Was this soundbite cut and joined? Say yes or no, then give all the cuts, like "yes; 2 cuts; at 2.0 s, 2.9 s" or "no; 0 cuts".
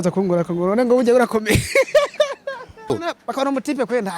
yes; 1 cut; at 2.9 s